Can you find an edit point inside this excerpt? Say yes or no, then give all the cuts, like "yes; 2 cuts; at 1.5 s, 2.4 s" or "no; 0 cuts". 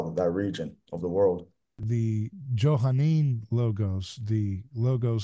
yes; 1 cut; at 1.8 s